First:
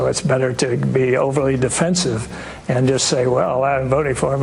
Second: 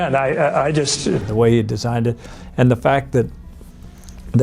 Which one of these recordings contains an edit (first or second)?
second